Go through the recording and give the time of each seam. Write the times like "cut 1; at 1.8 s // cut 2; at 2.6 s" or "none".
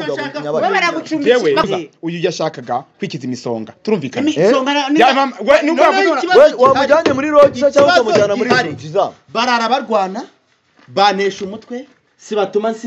cut 1; at 1.7 s